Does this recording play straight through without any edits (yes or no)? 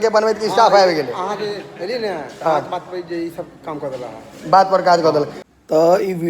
no